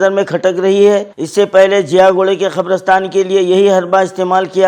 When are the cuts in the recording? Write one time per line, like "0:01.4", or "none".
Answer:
0:01.2